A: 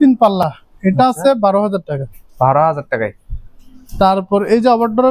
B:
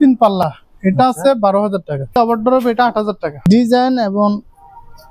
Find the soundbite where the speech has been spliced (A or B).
B